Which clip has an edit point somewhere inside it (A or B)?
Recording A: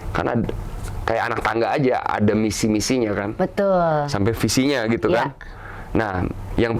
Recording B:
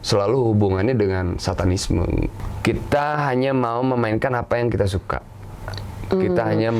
B